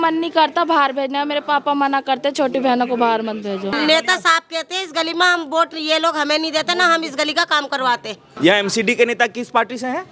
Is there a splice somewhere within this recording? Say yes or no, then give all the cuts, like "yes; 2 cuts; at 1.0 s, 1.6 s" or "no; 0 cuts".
yes; 2 cuts; at 3.7 s, 8.2 s